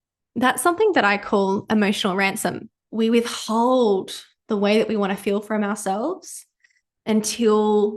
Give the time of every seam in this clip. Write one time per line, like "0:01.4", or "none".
0:02.7